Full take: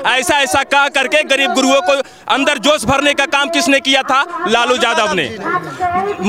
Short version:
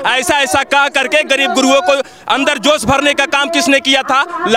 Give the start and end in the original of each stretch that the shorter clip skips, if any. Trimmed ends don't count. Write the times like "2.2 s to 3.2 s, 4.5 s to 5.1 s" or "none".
none